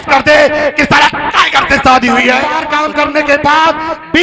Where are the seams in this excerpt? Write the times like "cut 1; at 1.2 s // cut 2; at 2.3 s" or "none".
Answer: cut 1; at 2.6 s